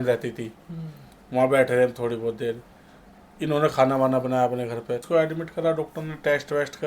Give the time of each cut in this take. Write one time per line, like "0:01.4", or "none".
0:05.0